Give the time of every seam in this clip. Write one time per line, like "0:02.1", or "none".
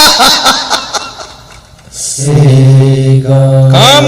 0:02.2